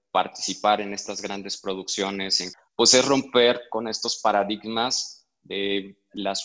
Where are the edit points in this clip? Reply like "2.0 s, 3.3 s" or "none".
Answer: 2.4 s